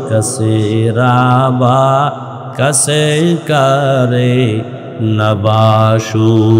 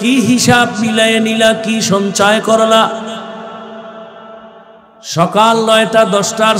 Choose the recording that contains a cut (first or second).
second